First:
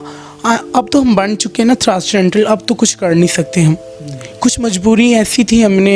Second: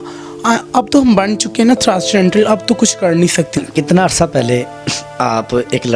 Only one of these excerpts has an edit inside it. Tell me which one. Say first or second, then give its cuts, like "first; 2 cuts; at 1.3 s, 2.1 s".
second; 1 cut; at 3.5 s